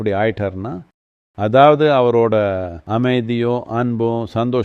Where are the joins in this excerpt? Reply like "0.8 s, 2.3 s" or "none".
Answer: 2.7 s